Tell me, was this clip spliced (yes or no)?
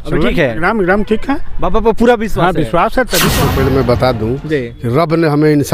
yes